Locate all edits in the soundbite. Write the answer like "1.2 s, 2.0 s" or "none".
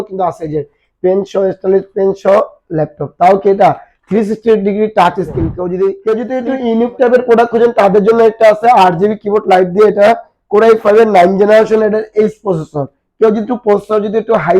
6.0 s